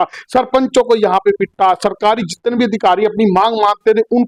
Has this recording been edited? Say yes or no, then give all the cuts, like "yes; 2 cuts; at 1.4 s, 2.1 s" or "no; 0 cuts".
no; 0 cuts